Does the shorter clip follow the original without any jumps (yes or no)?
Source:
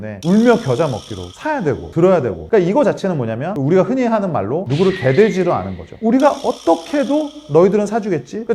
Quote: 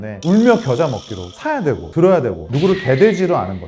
no